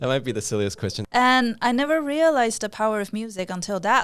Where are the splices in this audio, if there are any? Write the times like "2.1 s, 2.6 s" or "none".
1.0 s